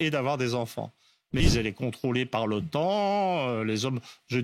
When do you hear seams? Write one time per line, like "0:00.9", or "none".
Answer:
0:01.4

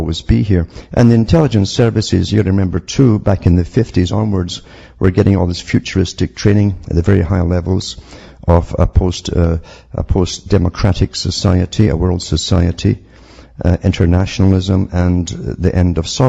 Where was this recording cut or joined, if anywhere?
0:01.7

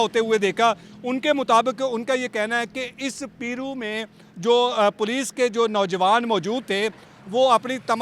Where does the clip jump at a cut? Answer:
none

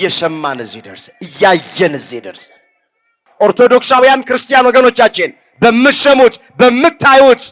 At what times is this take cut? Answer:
0:03.2

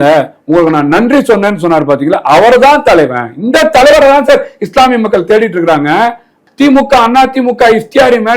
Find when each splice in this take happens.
0:06.4

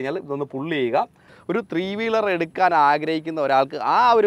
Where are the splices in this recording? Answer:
0:01.3

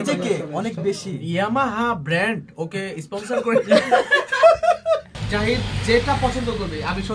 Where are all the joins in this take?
0:05.1

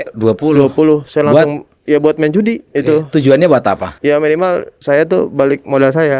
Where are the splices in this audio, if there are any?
0:02.6
0:03.9
0:04.7

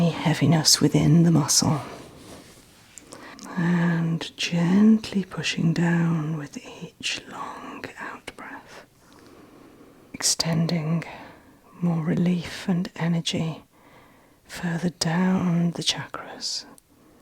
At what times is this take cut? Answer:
0:03.3
0:10.2

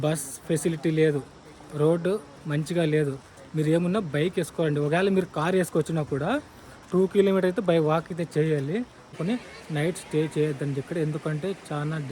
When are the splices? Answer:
0:09.2

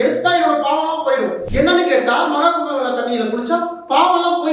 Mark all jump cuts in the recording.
0:01.4

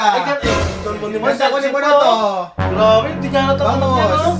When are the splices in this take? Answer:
none

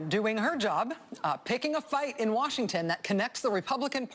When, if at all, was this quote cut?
0:03.0

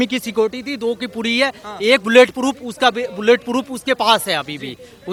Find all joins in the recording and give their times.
none

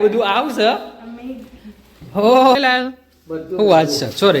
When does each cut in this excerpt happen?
0:02.6

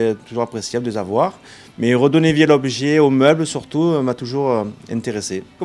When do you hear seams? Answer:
0:02.9

